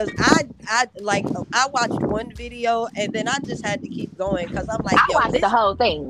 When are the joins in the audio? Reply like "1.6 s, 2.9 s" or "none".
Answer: none